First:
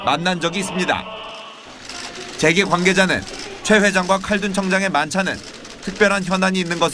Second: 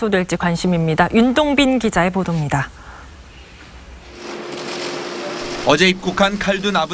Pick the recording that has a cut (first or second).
first